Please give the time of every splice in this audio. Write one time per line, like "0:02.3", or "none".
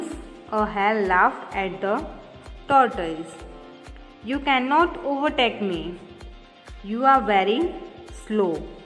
none